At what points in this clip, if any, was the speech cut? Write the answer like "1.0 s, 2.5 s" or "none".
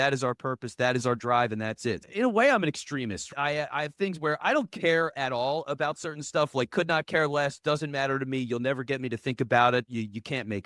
2.1 s